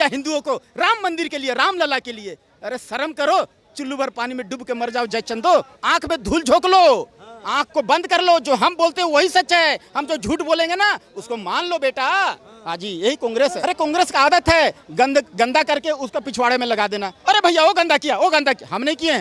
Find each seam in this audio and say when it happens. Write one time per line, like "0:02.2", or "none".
0:05.8
0:13.6